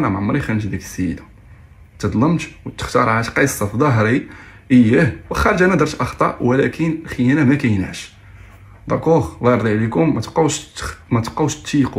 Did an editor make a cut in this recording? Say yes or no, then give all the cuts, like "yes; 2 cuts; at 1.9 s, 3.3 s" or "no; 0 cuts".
no; 0 cuts